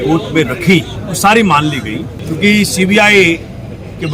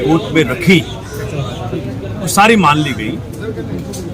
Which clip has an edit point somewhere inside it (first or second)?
first